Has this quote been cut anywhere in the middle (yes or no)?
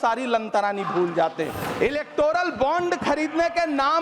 yes